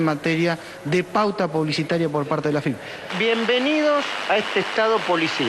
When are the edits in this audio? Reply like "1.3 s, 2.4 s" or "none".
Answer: none